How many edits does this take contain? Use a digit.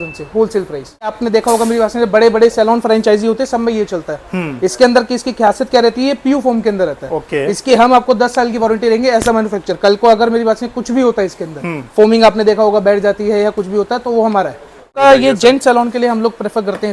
2